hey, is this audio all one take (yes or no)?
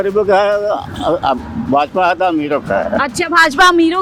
yes